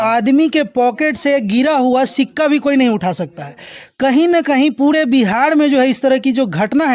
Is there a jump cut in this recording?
no; 0 cuts

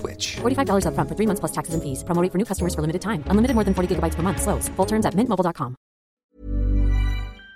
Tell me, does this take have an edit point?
yes; 1 cut; at 6.2 s

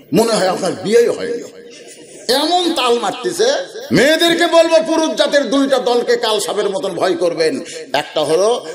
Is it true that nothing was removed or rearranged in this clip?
no; 1 cut; at 3.7 s

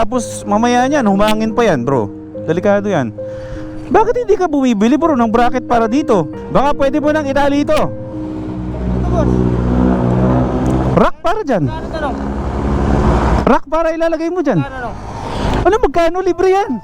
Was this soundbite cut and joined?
yes; 1 cut; at 6.4 s

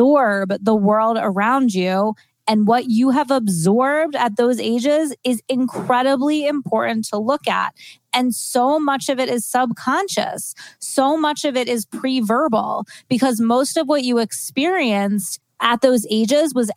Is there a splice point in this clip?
no; 0 cuts

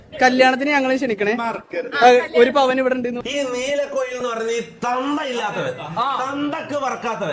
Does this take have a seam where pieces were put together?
yes; 1 cut; at 3.1 s

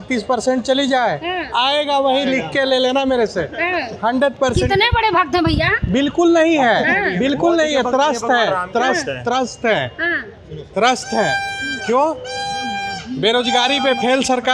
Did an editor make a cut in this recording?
no; 0 cuts

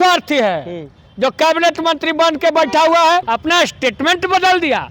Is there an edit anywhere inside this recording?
yes; 1 cut; at 3.3 s

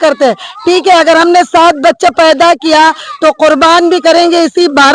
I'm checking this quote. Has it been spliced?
no; 0 cuts

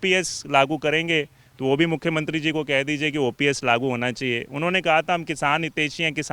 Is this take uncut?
yes; 0 cuts

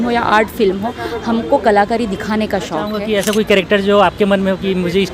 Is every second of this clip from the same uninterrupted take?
no; 1 cut; at 3.0 s

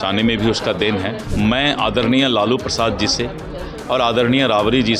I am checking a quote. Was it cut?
yes; 1 cut; at 1.2 s

